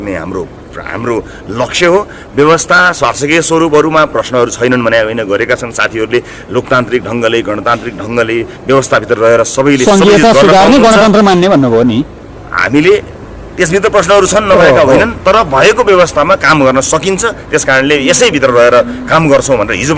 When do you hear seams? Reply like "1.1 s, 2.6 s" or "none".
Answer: none